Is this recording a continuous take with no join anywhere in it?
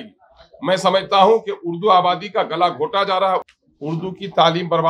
no; 1 cut; at 3.5 s

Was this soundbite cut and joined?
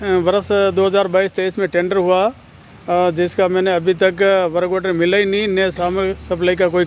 no; 0 cuts

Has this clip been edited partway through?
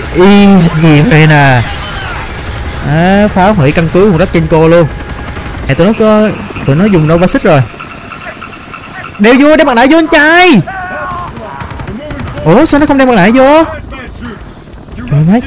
yes; 1 cut; at 5.7 s

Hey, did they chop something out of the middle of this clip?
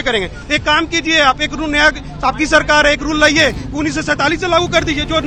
no; 0 cuts

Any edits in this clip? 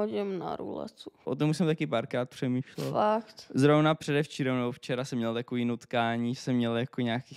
yes; 1 cut; at 1.3 s

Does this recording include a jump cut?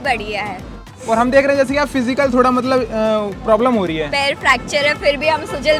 yes; 1 cut; at 0.9 s

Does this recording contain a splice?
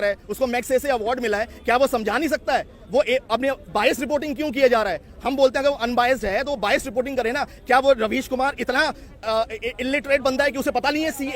no; 0 cuts

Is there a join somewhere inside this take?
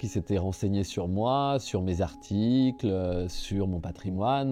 no; 0 cuts

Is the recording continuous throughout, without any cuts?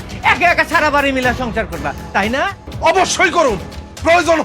no; 1 cut; at 2.6 s

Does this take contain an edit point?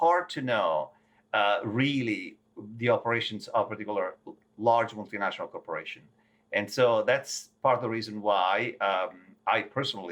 no; 0 cuts

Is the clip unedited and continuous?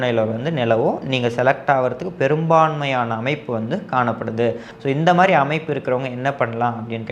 no; 1 cut; at 4.7 s

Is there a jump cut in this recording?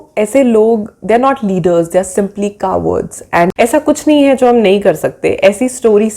yes; 1 cut; at 3.5 s

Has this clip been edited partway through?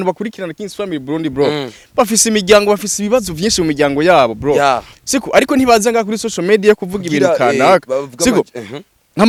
no; 0 cuts

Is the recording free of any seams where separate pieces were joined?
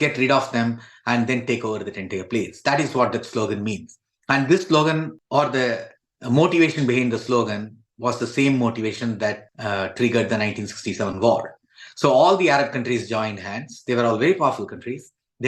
yes; 0 cuts

